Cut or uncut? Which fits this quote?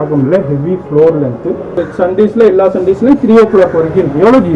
cut